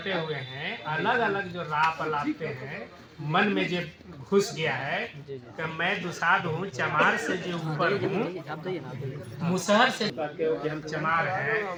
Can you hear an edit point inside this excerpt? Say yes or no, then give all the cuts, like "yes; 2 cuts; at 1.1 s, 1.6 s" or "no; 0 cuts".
no; 0 cuts